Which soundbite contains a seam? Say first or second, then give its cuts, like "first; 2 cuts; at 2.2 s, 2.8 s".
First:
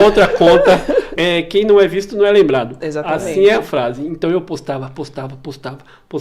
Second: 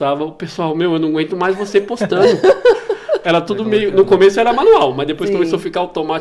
first; 1 cut; at 1.1 s